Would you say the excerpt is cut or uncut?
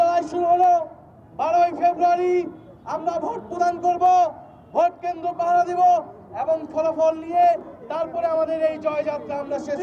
uncut